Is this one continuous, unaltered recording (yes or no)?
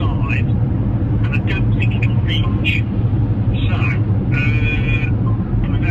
yes